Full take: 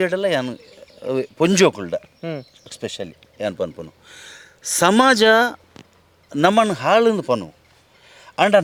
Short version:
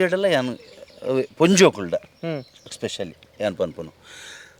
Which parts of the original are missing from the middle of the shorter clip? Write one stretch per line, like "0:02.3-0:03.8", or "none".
none